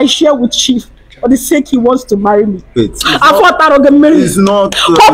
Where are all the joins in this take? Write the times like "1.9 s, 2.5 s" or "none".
2.8 s